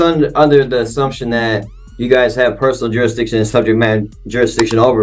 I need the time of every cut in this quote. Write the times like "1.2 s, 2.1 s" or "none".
none